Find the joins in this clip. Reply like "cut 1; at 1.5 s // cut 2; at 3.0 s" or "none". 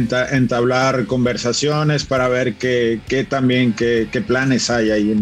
none